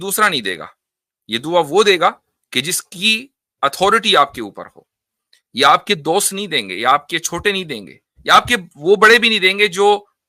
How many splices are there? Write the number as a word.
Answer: zero